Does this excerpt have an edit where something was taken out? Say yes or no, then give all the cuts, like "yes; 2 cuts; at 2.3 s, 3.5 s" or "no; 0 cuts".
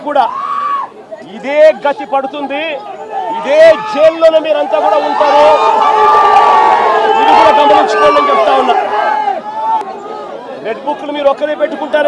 yes; 1 cut; at 9.9 s